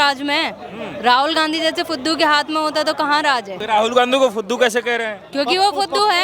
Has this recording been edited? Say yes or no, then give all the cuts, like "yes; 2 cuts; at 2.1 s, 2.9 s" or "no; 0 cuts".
yes; 1 cut; at 3.6 s